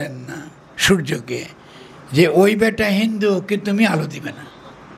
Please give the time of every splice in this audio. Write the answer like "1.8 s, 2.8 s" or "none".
none